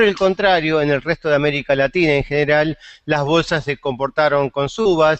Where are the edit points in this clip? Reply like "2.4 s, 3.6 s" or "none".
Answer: 2.7 s